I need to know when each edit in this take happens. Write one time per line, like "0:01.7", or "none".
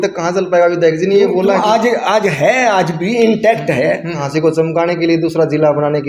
0:04.2